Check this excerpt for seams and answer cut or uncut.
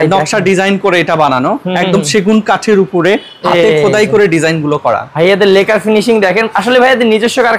uncut